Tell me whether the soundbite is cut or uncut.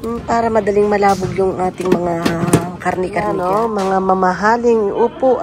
cut